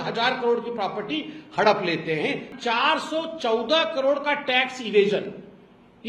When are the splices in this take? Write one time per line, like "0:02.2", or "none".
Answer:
0:02.5